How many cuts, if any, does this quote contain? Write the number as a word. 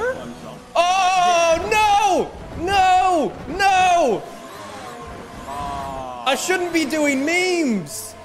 zero